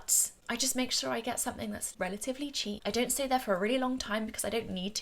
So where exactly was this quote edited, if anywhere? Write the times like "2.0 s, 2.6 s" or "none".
1.9 s, 2.8 s